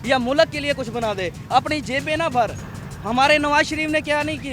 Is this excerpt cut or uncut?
uncut